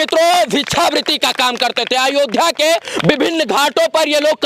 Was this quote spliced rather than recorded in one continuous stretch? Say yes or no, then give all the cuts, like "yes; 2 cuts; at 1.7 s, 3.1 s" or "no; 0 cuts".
no; 0 cuts